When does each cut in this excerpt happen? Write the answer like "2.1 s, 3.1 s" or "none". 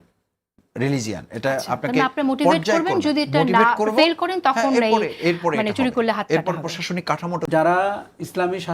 7.4 s